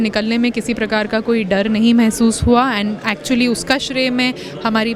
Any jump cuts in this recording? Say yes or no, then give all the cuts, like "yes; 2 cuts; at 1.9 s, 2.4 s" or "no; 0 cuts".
no; 0 cuts